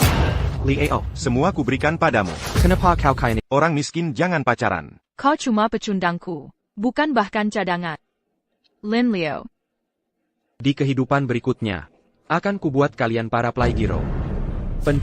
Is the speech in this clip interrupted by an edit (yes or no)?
yes